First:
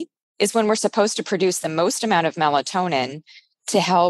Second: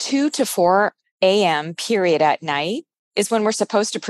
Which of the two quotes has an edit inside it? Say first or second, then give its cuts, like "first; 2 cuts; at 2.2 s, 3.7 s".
second; 1 cut; at 1.0 s